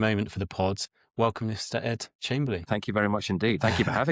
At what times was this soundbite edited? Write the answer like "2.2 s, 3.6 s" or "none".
0.9 s, 2.7 s